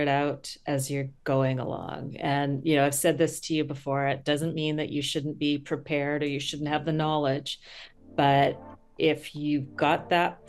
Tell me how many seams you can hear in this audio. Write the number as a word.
zero